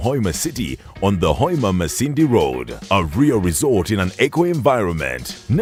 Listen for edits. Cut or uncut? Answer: uncut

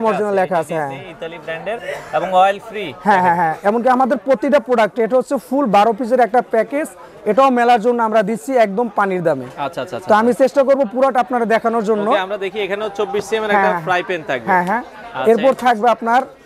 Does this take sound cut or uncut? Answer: uncut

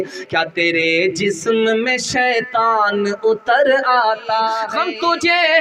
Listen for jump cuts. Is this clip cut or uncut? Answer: cut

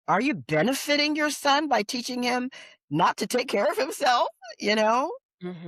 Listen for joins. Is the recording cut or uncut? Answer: uncut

